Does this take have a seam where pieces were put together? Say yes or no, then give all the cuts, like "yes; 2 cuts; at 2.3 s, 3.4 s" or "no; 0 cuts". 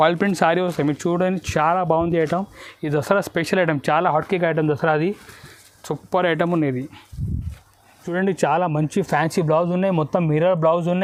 no; 0 cuts